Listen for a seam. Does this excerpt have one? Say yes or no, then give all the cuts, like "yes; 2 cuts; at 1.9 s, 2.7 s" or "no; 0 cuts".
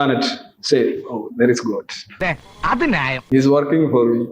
no; 0 cuts